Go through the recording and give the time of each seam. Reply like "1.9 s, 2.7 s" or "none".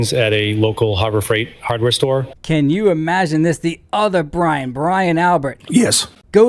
2.3 s